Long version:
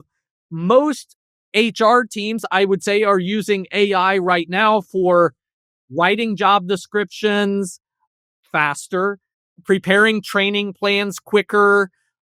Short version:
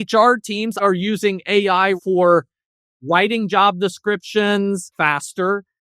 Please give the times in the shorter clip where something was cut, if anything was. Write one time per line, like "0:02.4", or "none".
0:00.8
0:02.0
0:04.9